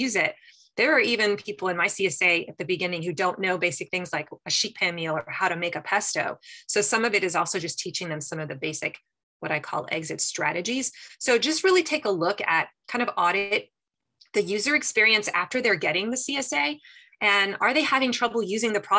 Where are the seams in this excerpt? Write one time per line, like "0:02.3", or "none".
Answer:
none